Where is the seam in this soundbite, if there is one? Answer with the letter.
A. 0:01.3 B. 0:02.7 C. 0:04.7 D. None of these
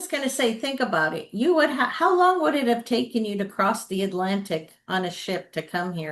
D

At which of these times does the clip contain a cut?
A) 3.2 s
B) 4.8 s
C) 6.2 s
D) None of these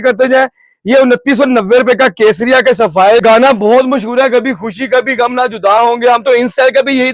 A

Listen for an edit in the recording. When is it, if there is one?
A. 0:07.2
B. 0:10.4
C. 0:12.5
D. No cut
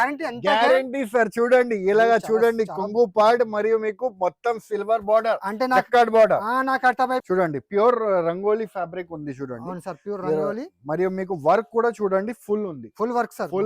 A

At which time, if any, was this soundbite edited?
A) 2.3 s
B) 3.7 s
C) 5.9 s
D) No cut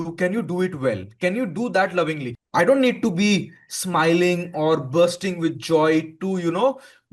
A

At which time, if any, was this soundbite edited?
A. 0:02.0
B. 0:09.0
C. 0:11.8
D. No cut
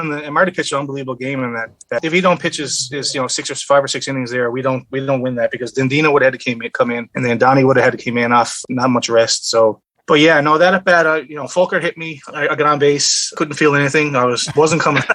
A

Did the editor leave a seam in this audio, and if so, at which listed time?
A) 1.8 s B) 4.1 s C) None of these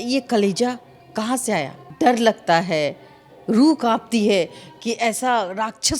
A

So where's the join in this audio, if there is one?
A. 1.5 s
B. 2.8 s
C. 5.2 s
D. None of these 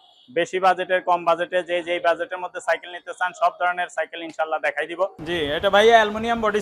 C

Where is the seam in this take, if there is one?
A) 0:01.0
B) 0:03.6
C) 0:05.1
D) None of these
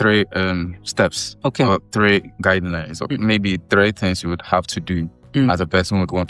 D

